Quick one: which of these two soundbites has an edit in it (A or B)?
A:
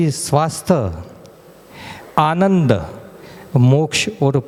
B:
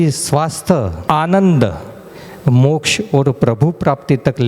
B